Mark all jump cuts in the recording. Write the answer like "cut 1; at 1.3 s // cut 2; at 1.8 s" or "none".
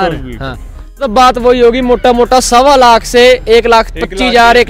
cut 1; at 1.1 s